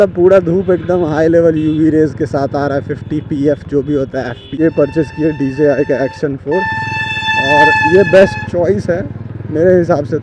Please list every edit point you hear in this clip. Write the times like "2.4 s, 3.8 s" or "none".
4.5 s